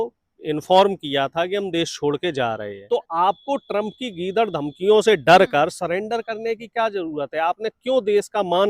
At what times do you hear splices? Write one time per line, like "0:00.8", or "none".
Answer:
0:02.7